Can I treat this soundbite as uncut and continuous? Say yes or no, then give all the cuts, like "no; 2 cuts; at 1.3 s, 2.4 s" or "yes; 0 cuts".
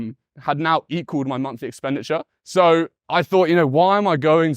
no; 2 cuts; at 2.4 s, 3.0 s